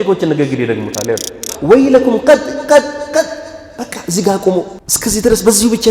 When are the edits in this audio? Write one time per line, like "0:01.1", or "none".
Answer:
0:01.5
0:04.8